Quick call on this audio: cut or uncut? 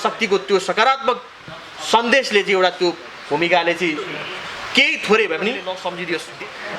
cut